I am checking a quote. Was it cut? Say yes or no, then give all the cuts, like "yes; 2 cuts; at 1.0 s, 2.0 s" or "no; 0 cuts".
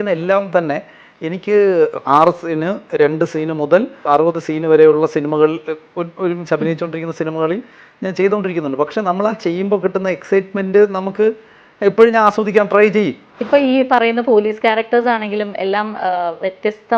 yes; 2 cuts; at 4.1 s, 13.3 s